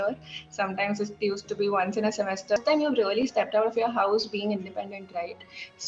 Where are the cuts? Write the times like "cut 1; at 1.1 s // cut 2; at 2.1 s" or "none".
cut 1; at 2.6 s